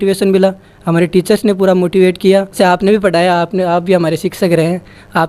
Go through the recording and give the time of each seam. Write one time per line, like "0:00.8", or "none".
0:02.6